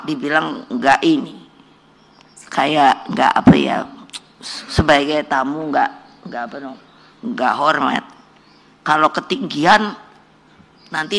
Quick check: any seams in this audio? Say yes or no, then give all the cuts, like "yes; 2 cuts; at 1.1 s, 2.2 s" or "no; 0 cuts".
no; 0 cuts